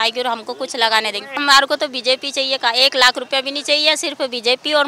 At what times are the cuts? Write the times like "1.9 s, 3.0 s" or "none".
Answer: 1.4 s